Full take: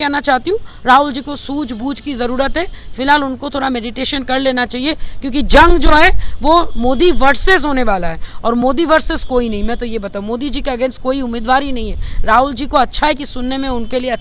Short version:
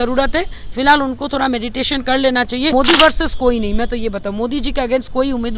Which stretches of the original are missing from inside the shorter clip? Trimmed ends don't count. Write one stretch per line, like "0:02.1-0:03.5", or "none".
0:04.9-0:08.6

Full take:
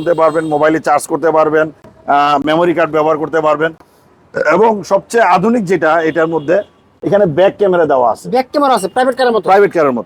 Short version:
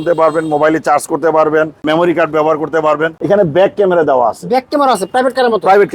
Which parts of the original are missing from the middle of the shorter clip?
0:01.8-0:02.4
0:03.7-0:06.9

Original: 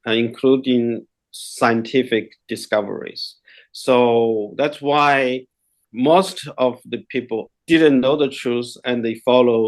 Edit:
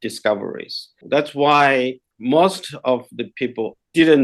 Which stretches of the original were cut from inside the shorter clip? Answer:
0:03.5-0:04.5
0:05.5-0:05.8

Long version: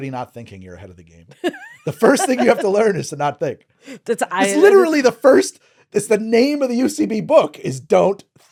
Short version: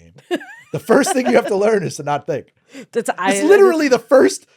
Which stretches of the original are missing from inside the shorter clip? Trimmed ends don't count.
none

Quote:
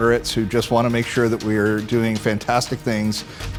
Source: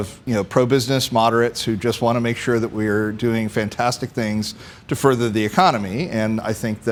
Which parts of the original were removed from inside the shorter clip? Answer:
none

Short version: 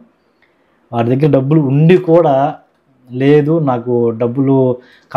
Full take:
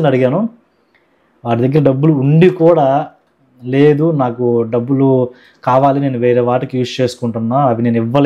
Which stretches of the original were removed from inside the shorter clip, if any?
none

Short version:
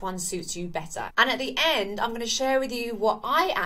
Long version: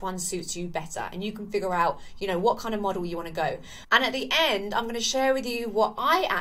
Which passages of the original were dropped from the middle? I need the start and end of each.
0:01.1-0:03.8

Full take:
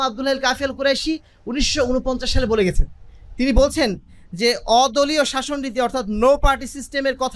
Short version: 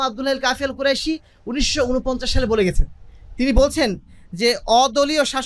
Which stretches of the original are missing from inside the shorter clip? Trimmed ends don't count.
none

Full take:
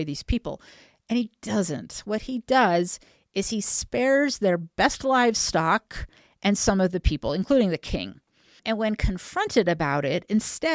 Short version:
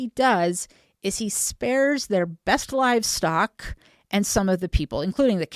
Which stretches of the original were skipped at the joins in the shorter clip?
none

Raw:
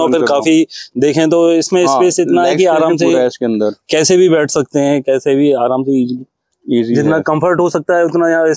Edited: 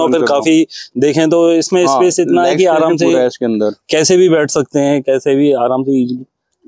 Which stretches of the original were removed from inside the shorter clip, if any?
none

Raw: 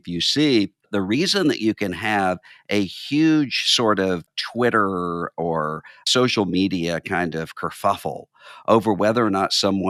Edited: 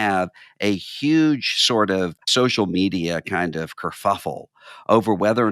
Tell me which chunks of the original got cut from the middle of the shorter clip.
0:04.3-0:06.0

